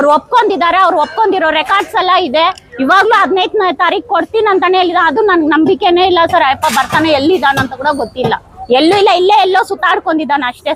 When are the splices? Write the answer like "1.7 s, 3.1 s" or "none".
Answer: none